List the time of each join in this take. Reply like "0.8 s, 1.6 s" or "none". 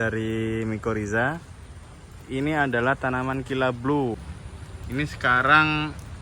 4.2 s

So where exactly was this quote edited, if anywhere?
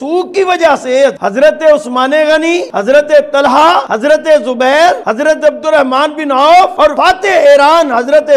2.7 s, 3.9 s, 5.1 s, 6.9 s

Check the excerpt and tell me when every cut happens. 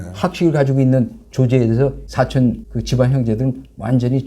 2.0 s, 2.7 s

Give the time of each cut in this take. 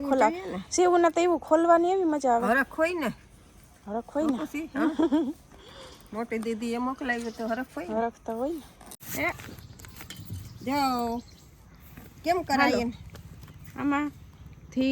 9.0 s

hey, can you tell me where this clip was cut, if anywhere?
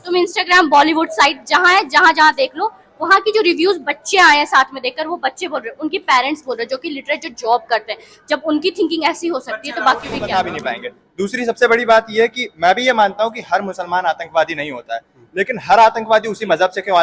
10.4 s

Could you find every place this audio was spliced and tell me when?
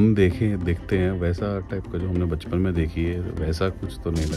none

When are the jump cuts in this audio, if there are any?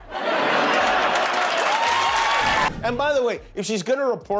2.8 s

